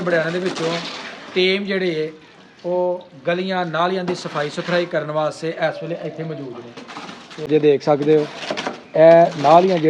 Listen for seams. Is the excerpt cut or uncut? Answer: cut